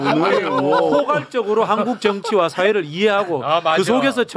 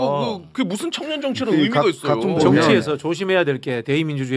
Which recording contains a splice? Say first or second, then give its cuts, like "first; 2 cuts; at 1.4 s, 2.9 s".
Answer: second; 1 cut; at 2.7 s